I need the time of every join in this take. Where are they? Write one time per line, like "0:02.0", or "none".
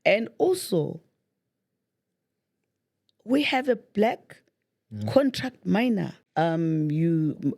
0:06.2

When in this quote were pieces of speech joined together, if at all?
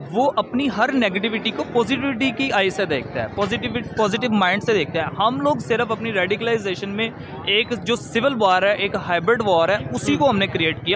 none

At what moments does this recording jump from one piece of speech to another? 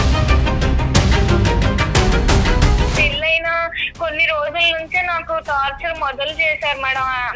0:03.0

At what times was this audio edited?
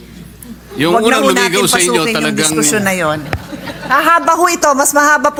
none

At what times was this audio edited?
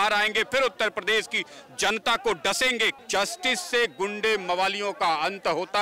0:02.9

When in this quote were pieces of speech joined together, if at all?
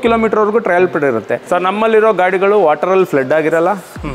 0:01.4

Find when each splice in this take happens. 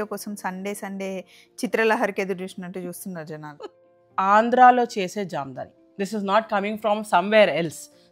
0:04.0

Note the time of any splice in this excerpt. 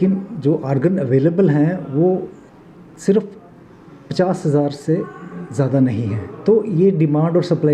0:06.3

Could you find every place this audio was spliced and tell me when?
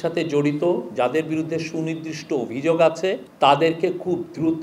0:03.3

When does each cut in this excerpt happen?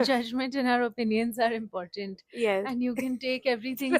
none

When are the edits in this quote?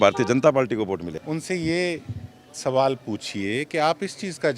0:01.2

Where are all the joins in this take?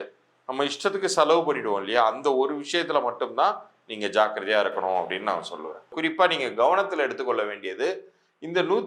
0:05.9

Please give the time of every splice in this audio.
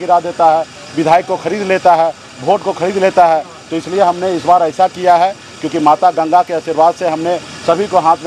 none

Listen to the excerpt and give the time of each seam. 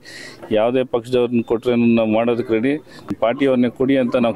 0:03.1

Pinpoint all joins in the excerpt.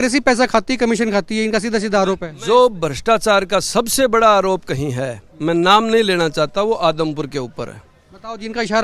0:02.3

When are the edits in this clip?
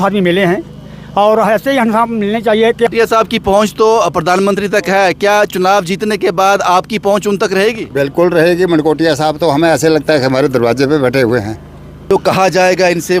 0:02.9
0:12.1

